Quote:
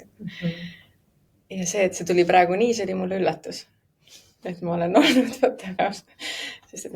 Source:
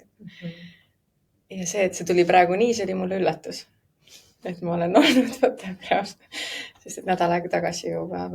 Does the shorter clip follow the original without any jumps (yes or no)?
no